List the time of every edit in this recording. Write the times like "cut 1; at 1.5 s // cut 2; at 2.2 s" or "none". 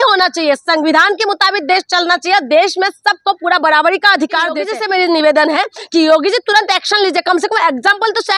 cut 1; at 4.6 s

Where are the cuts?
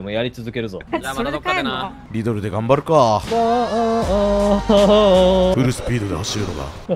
cut 1; at 0.8 s // cut 2; at 2.0 s // cut 3; at 5.5 s

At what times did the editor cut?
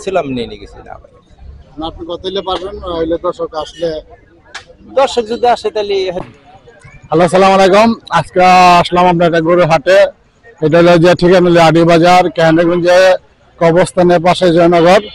cut 1; at 6.2 s

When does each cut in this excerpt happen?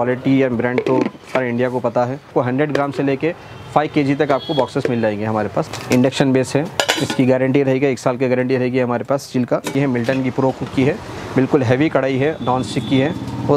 cut 1; at 2.3 s // cut 2; at 5.7 s // cut 3; at 9.7 s

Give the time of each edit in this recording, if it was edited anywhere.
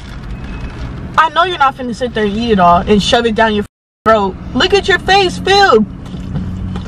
none

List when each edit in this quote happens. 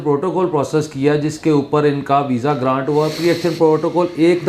none

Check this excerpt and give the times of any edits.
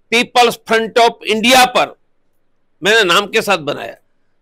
none

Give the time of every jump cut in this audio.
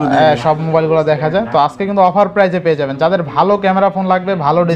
none

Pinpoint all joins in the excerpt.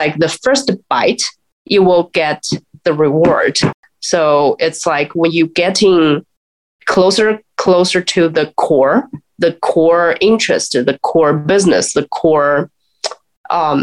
cut 1; at 3.8 s

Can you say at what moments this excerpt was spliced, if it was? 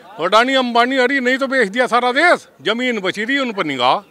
cut 1; at 2.5 s

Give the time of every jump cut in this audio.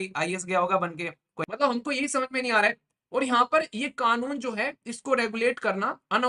cut 1; at 1.3 s

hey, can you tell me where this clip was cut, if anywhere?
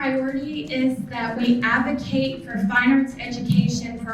cut 1; at 1.4 s

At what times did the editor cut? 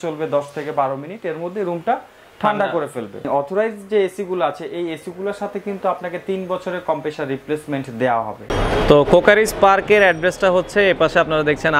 cut 1; at 3.2 s // cut 2; at 8.4 s

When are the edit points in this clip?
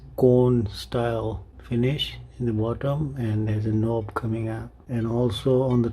cut 1; at 1.5 s // cut 2; at 4.7 s

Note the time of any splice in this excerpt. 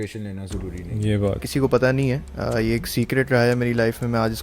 cut 1; at 1.4 s

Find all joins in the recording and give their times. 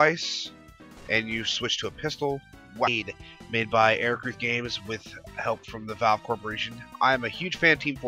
none

